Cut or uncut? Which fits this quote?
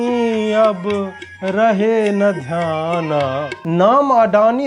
cut